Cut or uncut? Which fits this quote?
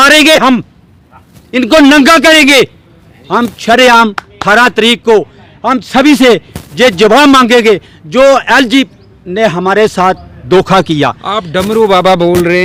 uncut